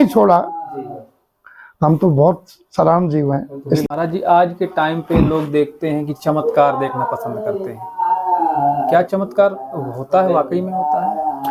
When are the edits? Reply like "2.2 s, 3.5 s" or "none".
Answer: 3.8 s